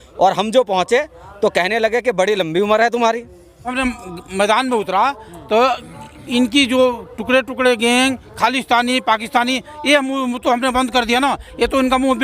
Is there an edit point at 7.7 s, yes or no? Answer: no